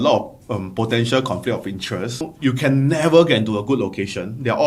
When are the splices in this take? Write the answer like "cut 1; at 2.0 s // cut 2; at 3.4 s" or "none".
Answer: cut 1; at 2.2 s